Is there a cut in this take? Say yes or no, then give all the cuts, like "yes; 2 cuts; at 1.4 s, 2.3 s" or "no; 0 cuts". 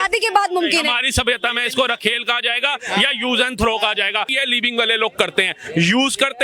yes; 1 cut; at 4.3 s